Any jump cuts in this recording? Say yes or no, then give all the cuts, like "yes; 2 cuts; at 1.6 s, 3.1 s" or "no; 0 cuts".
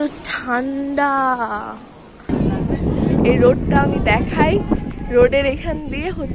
yes; 1 cut; at 2.3 s